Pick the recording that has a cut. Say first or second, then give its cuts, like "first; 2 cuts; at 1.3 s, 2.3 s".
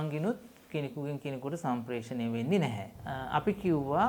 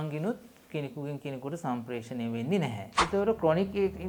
second; 1 cut; at 3.0 s